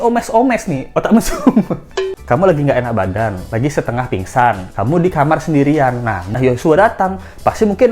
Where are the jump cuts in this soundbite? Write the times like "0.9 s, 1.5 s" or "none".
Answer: 2.1 s, 6.2 s